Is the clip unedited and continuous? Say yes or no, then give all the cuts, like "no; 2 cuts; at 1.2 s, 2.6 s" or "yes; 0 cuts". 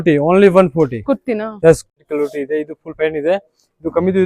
no; 1 cut; at 1.9 s